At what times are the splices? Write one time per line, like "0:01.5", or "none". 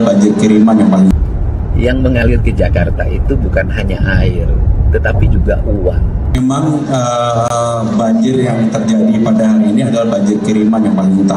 0:01.1
0:06.2